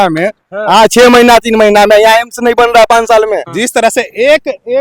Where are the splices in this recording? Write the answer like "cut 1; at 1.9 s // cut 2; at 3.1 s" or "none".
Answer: cut 1; at 3.5 s